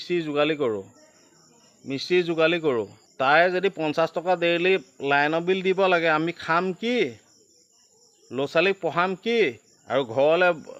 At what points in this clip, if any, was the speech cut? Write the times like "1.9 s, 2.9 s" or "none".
3.0 s